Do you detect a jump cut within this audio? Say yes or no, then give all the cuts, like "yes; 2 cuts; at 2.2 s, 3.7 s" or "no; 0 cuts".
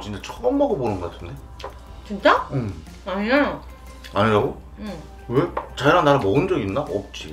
no; 0 cuts